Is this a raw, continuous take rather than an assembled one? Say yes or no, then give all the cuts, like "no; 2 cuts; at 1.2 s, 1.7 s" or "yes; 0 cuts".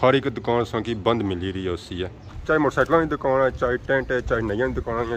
yes; 0 cuts